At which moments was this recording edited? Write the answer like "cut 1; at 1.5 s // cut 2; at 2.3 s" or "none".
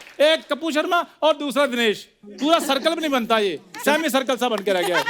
none